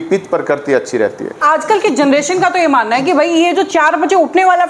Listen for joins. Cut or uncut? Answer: cut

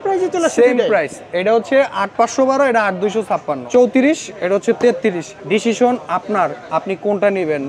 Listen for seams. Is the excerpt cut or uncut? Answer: cut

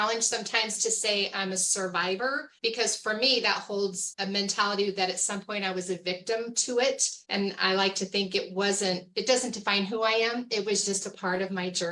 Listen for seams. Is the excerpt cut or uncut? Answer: uncut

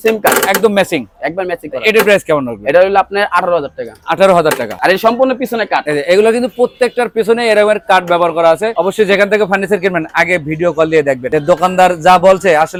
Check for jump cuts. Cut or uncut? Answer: uncut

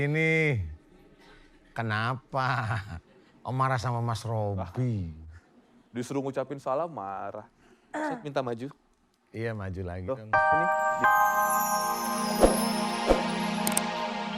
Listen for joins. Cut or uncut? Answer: cut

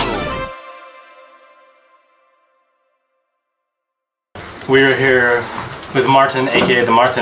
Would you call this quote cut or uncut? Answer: uncut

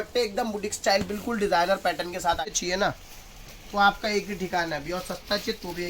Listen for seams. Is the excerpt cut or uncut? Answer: cut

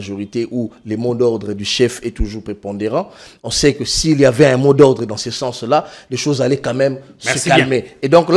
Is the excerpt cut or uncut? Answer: uncut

